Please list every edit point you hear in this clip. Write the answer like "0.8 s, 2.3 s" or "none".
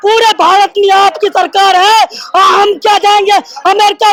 none